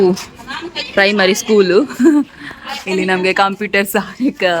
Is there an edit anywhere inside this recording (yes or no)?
no